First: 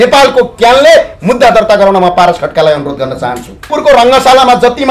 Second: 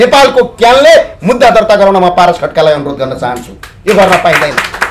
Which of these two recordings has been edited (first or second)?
first